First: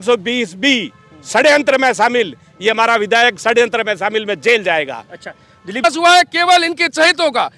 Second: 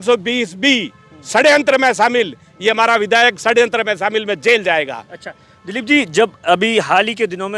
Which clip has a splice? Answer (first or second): first